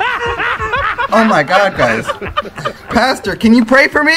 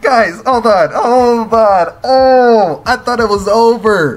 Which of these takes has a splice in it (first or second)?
first